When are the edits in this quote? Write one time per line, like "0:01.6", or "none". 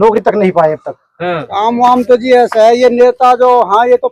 0:01.4